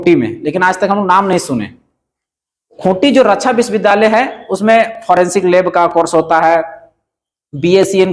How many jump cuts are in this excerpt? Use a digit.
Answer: 0